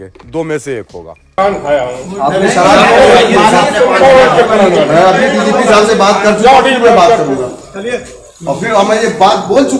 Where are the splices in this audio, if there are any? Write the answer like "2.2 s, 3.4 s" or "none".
1.3 s